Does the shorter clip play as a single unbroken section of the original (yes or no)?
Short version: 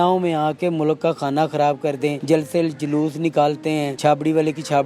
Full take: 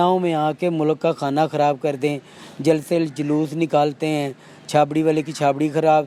no